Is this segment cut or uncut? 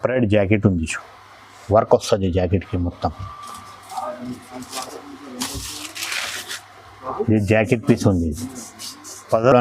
uncut